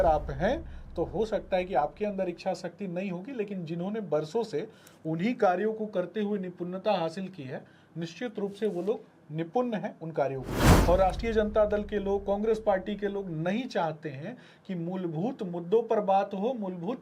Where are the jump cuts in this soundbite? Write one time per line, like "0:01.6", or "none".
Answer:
0:10.7